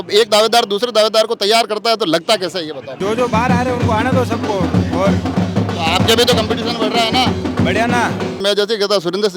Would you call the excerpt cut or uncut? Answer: cut